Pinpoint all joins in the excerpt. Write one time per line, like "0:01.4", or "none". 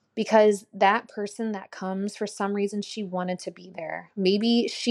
none